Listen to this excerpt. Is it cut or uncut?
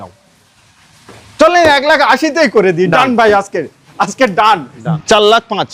cut